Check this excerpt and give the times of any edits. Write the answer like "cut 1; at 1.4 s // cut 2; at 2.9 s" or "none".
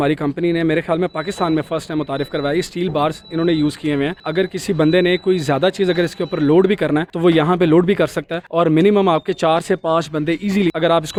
none